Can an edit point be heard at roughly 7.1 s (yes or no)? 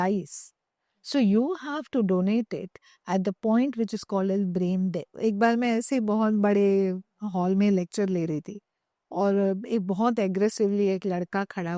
no